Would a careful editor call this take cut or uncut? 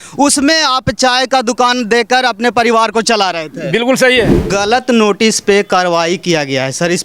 cut